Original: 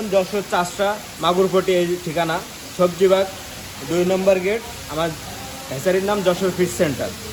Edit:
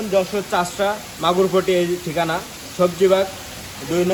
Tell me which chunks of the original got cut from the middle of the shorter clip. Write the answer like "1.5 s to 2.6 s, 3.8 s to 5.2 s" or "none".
none